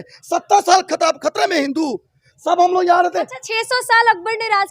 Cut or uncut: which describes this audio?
uncut